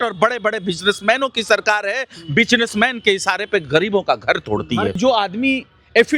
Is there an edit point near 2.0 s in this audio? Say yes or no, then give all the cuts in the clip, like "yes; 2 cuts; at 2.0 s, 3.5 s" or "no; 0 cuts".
no; 1 cut; at 5.0 s